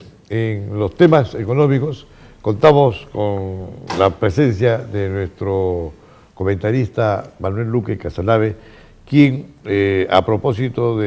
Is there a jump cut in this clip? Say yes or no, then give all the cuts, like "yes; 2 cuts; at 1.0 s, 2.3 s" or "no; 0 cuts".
no; 0 cuts